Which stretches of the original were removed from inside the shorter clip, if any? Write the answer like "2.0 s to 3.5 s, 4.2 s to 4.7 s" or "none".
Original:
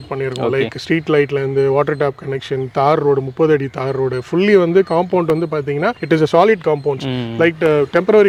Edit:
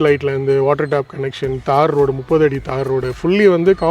none